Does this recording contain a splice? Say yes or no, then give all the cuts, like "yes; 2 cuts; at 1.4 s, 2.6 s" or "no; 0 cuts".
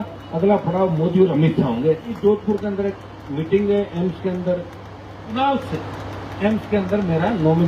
yes; 2 cuts; at 2.2 s, 5.3 s